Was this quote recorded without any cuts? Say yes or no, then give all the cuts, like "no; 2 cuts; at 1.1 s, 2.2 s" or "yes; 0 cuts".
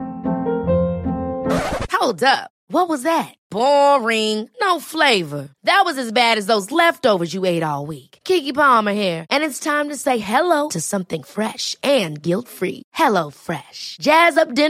yes; 0 cuts